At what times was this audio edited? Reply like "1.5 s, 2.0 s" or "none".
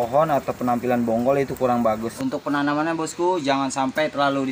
2.0 s